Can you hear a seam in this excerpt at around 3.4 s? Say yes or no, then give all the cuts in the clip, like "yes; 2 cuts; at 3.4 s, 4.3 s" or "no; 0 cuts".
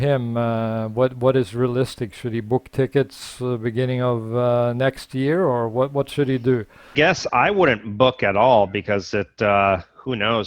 no; 1 cut; at 6.9 s